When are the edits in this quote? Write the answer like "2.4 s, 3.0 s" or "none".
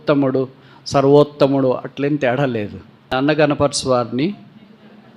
3.1 s